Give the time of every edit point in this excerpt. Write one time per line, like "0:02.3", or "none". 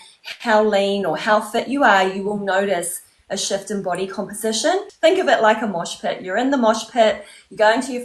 0:04.9